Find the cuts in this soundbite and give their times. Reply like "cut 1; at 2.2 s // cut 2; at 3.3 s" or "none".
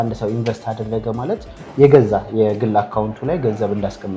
none